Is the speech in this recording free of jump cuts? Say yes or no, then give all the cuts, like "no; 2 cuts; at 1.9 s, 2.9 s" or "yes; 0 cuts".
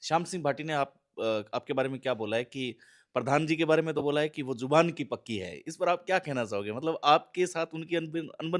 yes; 0 cuts